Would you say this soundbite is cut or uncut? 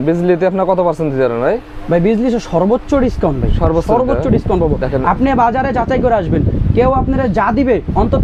uncut